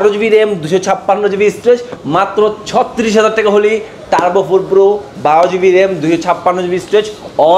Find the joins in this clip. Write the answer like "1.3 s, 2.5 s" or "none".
2.0 s